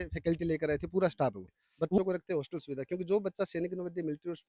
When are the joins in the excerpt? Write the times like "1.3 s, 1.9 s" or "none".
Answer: 2.0 s